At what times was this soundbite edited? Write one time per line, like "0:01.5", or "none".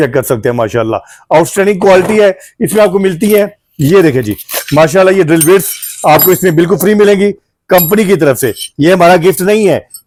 none